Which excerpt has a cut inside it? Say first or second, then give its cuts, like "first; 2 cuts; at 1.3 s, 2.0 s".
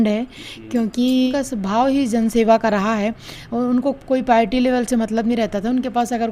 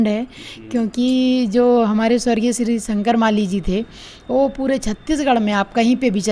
first; 1 cut; at 1.3 s